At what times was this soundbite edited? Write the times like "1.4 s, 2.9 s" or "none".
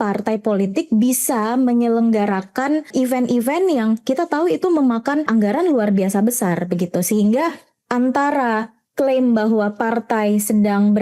2.9 s, 5.3 s